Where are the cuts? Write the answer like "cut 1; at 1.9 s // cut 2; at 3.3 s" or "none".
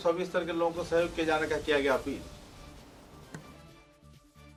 none